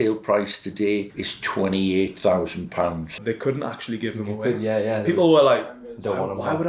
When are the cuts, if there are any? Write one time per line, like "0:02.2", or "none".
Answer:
0:03.2